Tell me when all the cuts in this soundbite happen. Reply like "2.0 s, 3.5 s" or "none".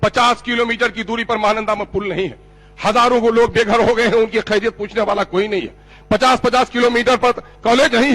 none